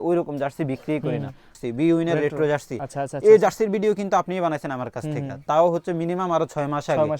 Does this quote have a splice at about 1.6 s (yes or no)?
yes